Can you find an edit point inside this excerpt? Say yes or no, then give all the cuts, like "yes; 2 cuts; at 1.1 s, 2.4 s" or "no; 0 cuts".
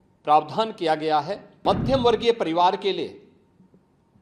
yes; 1 cut; at 1.4 s